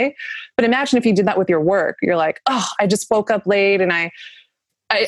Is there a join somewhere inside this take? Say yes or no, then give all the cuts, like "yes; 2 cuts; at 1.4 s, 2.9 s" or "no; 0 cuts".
no; 0 cuts